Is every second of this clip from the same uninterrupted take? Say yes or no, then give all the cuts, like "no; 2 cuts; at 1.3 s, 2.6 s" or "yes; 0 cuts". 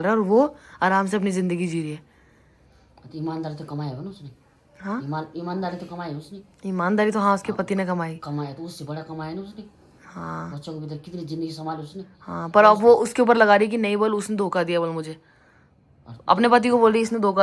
yes; 0 cuts